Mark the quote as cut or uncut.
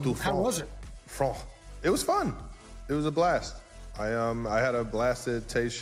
uncut